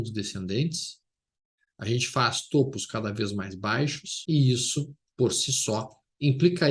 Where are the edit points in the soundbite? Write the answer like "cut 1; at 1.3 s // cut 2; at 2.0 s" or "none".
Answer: cut 1; at 4.1 s